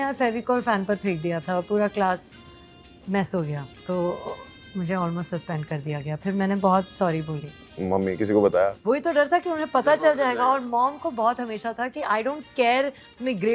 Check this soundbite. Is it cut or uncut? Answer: uncut